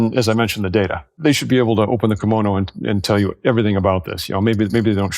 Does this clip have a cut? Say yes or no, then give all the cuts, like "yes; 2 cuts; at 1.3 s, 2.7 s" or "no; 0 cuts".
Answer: yes; 1 cut; at 1.0 s